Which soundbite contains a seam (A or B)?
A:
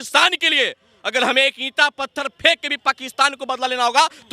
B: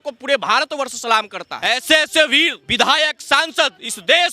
B